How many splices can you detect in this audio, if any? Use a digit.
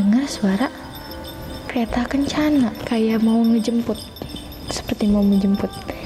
1